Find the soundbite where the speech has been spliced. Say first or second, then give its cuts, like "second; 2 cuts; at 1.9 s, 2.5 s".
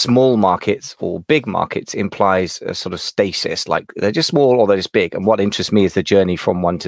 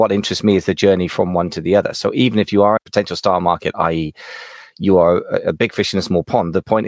second; 1 cut; at 2.8 s